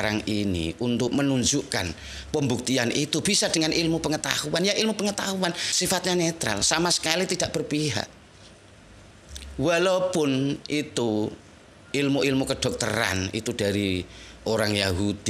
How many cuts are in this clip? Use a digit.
0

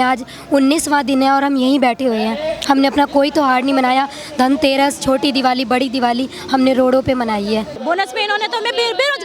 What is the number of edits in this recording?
1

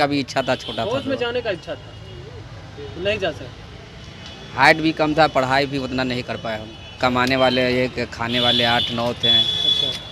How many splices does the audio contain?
1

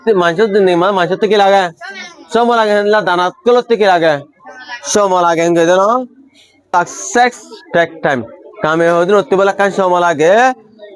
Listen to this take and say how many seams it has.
1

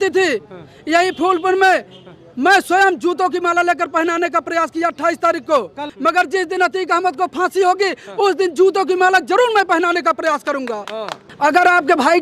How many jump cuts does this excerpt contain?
2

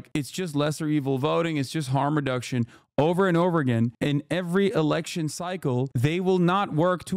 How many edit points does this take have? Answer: 0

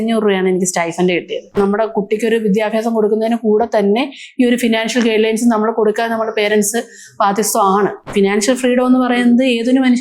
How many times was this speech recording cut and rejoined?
2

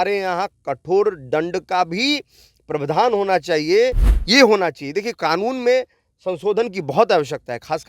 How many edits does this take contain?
1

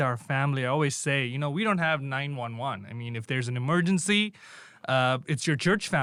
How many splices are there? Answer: 0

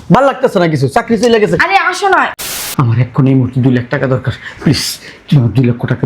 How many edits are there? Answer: 1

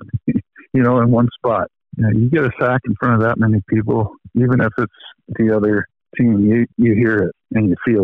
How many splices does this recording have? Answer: 4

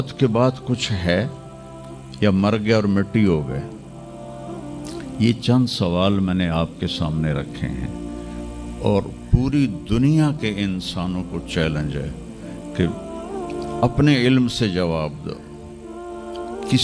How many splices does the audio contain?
0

